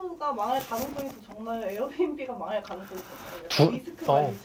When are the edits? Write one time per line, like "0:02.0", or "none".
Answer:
none